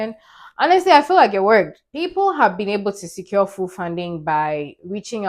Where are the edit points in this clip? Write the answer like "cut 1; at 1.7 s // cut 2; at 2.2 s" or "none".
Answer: cut 1; at 1.8 s